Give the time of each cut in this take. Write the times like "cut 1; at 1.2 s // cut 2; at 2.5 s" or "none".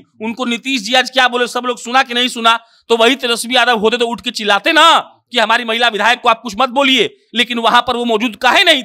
none

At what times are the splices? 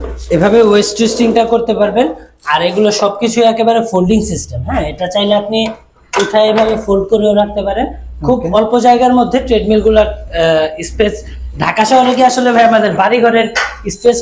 none

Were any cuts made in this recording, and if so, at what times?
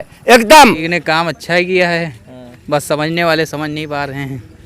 cut 1; at 0.9 s

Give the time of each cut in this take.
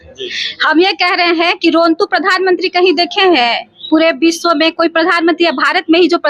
none

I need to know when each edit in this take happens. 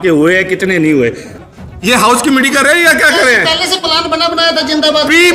cut 1; at 1.3 s

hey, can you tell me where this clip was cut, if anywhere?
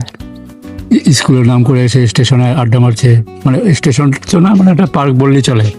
none

